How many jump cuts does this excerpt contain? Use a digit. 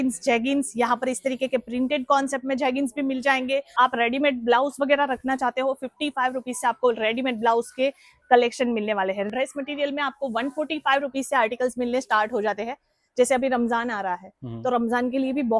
2